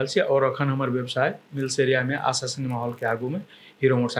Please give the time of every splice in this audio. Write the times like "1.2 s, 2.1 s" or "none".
none